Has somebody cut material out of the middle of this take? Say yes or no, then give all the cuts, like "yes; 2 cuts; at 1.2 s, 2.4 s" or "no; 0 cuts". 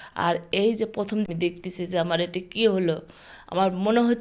yes; 1 cut; at 1.3 s